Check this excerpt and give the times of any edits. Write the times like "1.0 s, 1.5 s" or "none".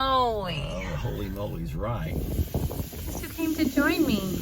2.1 s